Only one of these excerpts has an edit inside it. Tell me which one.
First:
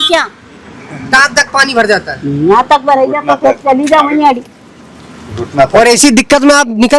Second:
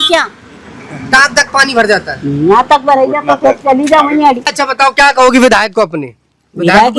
second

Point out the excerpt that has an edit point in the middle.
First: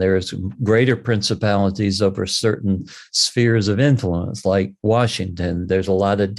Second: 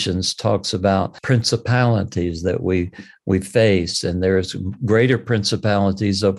second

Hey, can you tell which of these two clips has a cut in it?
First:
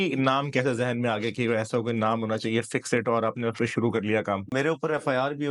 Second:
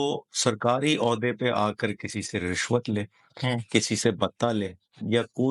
first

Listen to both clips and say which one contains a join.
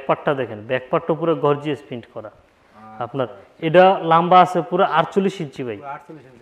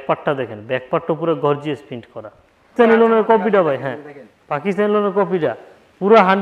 second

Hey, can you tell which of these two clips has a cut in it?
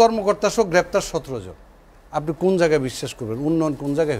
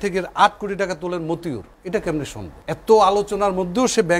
second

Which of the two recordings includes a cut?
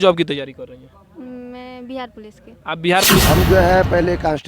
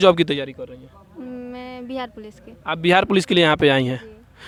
first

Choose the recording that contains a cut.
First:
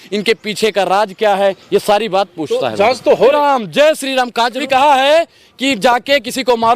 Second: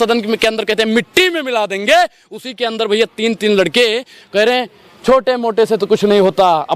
first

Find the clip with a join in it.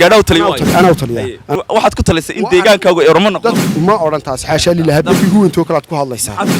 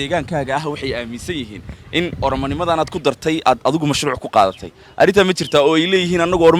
first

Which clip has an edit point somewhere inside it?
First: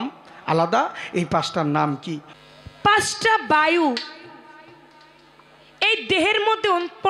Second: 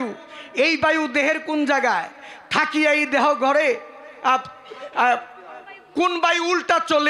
first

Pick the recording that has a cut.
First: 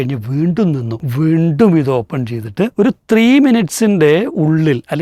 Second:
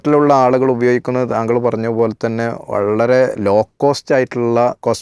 first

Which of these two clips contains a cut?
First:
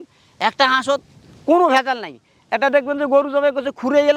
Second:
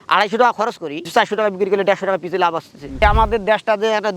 second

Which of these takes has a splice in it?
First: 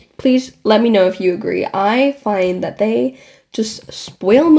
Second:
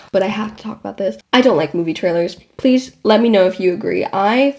second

